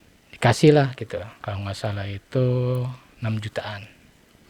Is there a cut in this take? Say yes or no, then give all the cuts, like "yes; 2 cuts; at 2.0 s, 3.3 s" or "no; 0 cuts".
yes; 2 cuts; at 1.4 s, 3.0 s